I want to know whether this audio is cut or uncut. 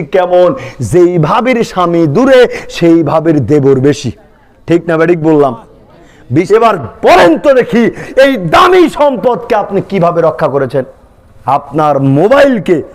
cut